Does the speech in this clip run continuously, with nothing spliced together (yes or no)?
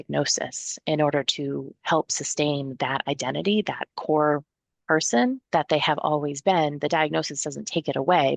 no